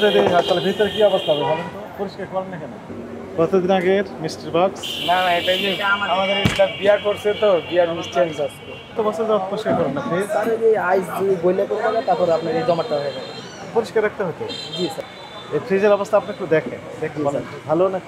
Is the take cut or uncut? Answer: cut